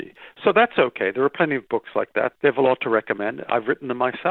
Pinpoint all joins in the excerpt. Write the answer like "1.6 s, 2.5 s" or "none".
2.3 s